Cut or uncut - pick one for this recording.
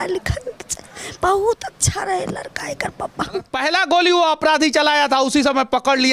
cut